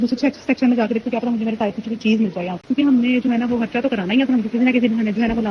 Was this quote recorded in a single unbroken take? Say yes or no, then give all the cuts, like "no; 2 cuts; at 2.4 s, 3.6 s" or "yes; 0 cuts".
no; 1 cut; at 2.6 s